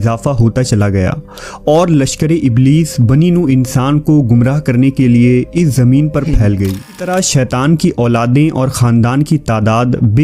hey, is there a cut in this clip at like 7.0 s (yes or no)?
yes